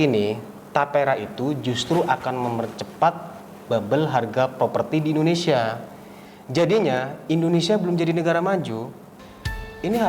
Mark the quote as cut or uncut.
uncut